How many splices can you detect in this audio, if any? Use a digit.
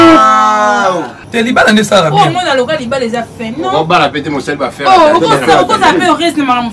1